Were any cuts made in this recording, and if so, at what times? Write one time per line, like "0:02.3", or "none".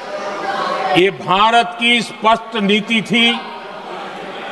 none